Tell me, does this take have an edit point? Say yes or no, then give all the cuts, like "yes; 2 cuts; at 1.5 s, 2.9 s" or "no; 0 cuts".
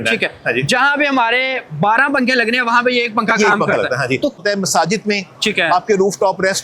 yes; 1 cut; at 4.4 s